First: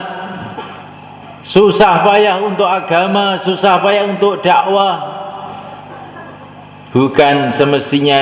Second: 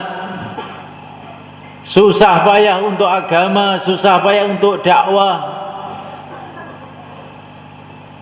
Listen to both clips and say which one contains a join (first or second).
first